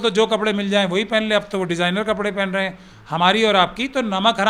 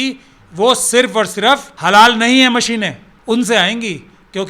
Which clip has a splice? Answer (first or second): second